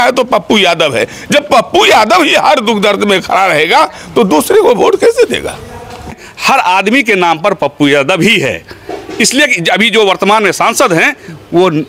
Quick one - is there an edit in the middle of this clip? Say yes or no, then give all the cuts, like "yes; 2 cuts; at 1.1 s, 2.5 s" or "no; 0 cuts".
yes; 1 cut; at 6.2 s